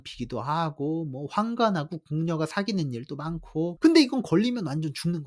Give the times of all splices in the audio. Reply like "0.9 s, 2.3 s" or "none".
3.7 s